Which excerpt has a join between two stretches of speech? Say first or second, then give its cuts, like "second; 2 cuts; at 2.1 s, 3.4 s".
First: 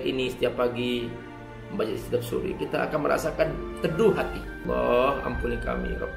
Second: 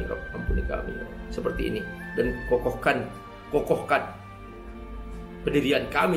first; 1 cut; at 4.5 s